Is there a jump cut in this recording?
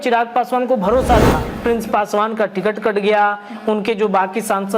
yes; 1 cut; at 1.4 s

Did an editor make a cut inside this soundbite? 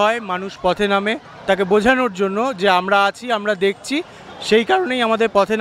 no; 0 cuts

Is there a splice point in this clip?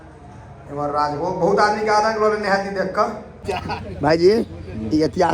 yes; 1 cut; at 3.3 s

